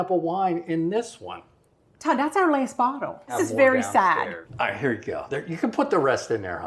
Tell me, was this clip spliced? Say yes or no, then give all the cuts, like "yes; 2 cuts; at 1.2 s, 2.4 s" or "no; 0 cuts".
yes; 2 cuts; at 3.3 s, 4.4 s